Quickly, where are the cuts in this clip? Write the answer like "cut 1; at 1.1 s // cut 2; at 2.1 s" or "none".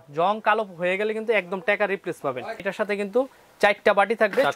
cut 1; at 2.6 s